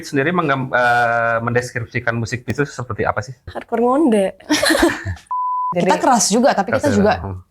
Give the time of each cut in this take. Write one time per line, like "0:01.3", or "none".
0:03.5
0:05.6